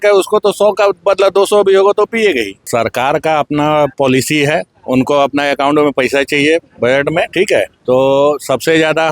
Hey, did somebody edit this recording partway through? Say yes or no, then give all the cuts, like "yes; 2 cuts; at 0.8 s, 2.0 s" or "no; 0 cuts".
yes; 3 cuts; at 2.6 s, 4.7 s, 7.8 s